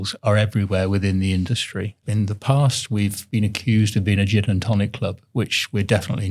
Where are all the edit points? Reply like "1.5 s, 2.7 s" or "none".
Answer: 2.0 s, 3.2 s